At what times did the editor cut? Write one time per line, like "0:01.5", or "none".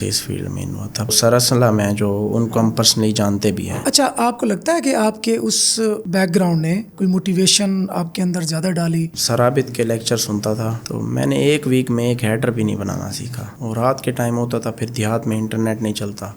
0:01.1
0:03.8
0:09.2
0:13.5